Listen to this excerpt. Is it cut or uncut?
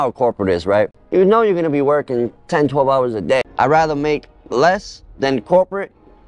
cut